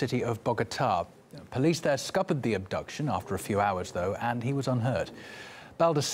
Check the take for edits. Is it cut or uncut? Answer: cut